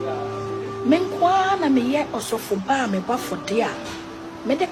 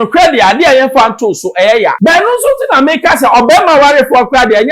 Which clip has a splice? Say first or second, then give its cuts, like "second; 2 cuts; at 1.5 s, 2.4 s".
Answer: second; 1 cut; at 2.0 s